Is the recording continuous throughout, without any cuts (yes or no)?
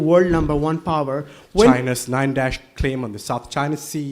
no